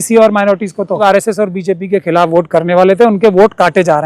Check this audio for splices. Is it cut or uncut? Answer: cut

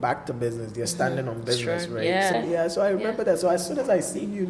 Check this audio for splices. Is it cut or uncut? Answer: cut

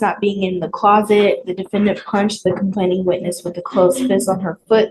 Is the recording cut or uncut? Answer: uncut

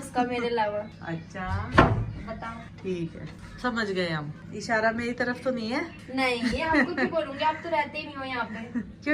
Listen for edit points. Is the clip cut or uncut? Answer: uncut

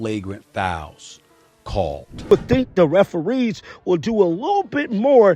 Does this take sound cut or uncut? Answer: cut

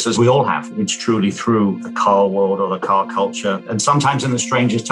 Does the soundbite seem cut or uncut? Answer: uncut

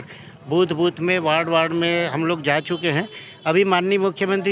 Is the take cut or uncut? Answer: uncut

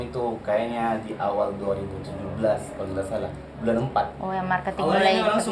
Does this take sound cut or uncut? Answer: uncut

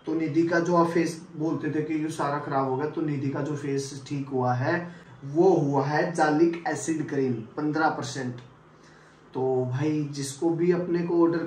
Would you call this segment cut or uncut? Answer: uncut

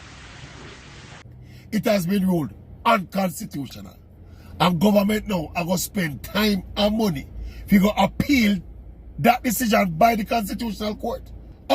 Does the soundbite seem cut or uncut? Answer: cut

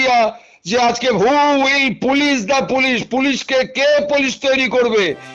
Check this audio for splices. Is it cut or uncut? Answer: uncut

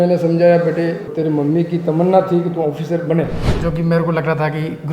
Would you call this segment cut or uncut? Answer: cut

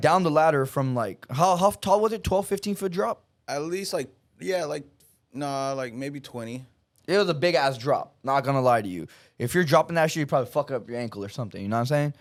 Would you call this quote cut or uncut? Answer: uncut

